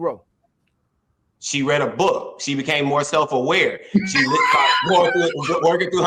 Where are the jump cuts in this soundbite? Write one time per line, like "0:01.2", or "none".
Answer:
none